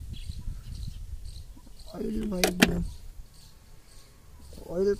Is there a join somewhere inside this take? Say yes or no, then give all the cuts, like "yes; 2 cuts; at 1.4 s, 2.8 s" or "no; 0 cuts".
no; 0 cuts